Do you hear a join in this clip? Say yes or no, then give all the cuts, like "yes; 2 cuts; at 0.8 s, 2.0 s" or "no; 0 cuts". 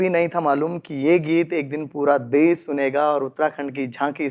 no; 0 cuts